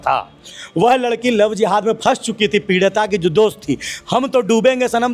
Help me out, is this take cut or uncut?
uncut